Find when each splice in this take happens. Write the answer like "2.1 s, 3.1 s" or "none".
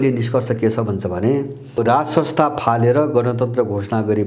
1.8 s